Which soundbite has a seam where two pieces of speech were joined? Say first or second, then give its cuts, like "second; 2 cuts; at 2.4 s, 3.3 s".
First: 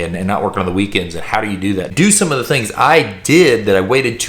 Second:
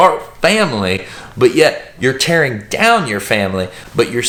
first; 1 cut; at 1.9 s